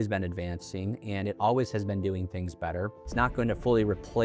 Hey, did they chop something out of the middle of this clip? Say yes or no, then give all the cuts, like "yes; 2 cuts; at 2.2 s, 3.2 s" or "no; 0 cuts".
yes; 1 cut; at 3.1 s